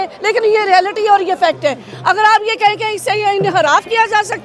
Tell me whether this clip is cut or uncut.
uncut